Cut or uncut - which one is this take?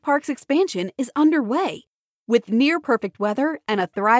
uncut